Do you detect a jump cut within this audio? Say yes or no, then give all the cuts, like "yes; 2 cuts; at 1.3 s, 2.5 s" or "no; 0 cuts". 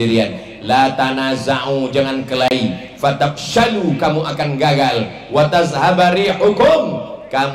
no; 0 cuts